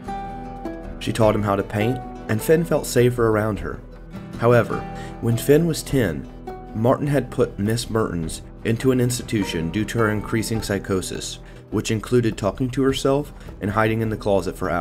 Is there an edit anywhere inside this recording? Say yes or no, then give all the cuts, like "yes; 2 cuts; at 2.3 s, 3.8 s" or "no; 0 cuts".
yes; 1 cut; at 13.5 s